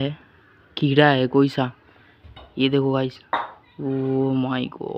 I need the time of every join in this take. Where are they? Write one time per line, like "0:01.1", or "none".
none